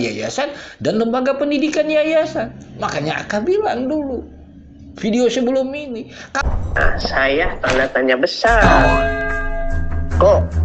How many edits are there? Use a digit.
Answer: 1